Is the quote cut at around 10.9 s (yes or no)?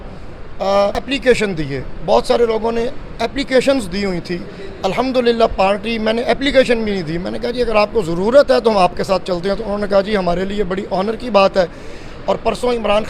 no